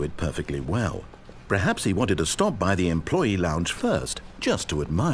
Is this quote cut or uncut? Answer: uncut